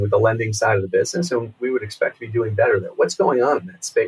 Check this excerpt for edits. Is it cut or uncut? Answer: uncut